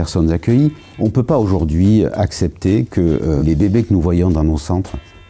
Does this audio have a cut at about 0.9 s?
yes; 2 cuts; at 0.9 s, 3.4 s

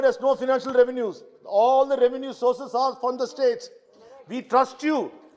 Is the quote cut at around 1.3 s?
no; 0 cuts

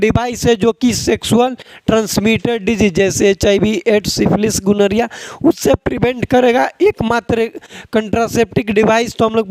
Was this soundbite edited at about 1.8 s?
no; 0 cuts

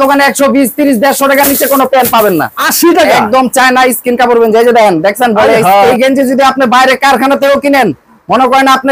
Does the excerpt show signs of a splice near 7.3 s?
no; 2 cuts; at 2.6 s, 5.9 s

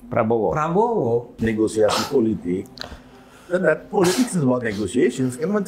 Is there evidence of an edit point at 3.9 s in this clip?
no; 1 cut; at 1.3 s

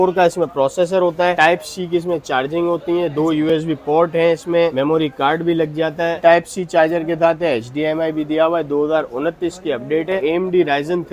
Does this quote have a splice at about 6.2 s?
yes; 4 cuts; at 1.4 s, 4.7 s, 6.2 s, 10.2 s

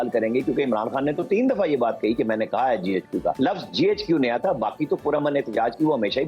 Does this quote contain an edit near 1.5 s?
no; 1 cut; at 3.4 s

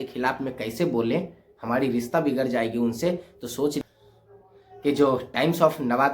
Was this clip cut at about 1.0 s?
no; 1 cut; at 3.8 s

